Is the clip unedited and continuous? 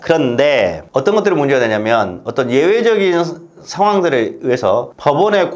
yes; 0 cuts

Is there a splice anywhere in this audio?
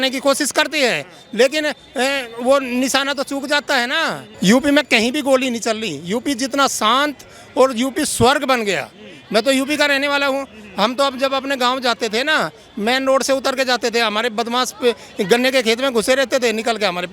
yes; 1 cut; at 4.2 s

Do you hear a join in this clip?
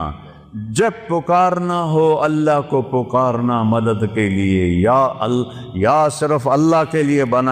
no; 0 cuts

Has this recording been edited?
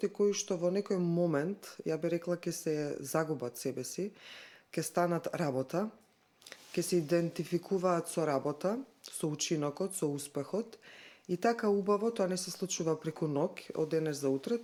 no; 0 cuts

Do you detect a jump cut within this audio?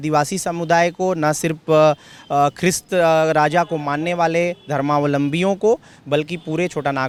no; 0 cuts

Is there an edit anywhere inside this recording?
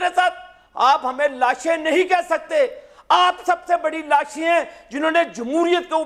no; 0 cuts

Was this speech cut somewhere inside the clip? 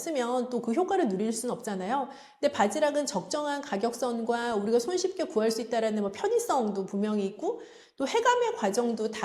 no; 0 cuts

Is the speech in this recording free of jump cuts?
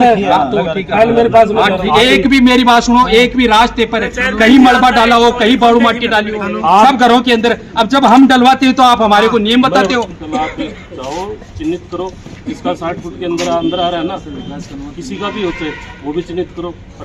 no; 2 cuts; at 1.8 s, 10.1 s

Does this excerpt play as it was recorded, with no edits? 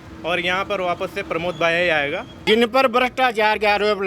no; 1 cut; at 2.4 s

